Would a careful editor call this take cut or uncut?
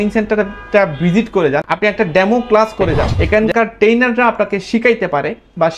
cut